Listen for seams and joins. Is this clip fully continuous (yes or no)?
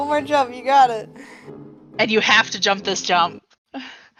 yes